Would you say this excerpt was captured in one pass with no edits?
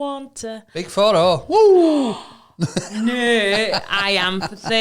yes; 0 cuts

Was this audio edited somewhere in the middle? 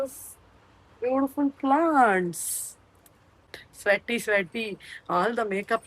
yes; 1 cut; at 3.6 s

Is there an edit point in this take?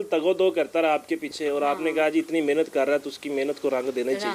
no; 0 cuts

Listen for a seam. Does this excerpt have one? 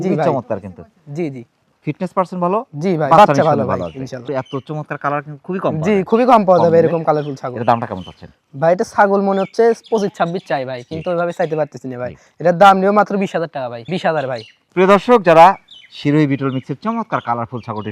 no; 0 cuts

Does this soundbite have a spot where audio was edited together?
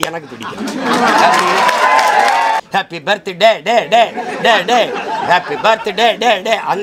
yes; 1 cut; at 2.6 s

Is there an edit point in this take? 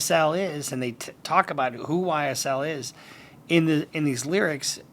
no; 0 cuts

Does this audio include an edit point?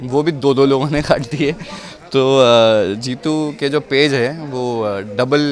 no; 0 cuts

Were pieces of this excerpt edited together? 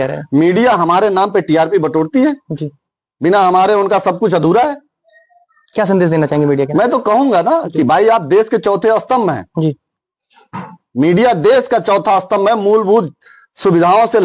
no; 0 cuts

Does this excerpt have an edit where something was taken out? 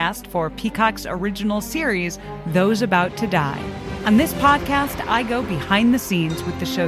yes; 1 cut; at 3.9 s

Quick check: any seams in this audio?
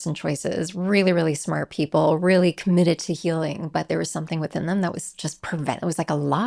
no; 0 cuts

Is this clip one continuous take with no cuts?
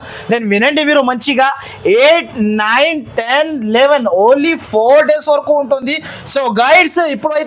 yes; 0 cuts

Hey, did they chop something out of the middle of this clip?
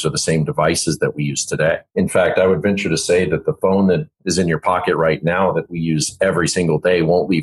yes; 2 cuts; at 1.9 s, 4.2 s

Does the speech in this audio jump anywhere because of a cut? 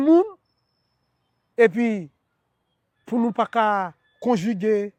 no; 0 cuts

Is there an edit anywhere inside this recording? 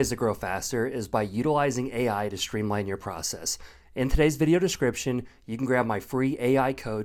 no; 0 cuts

